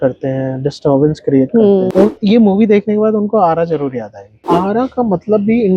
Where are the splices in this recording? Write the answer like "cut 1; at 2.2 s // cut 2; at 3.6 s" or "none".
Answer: cut 1; at 1.9 s // cut 2; at 4.4 s